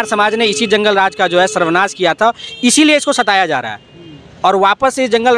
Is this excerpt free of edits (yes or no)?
yes